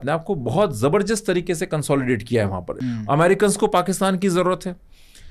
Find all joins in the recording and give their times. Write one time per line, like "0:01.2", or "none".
0:02.7